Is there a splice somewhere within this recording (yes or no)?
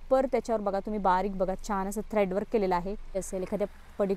yes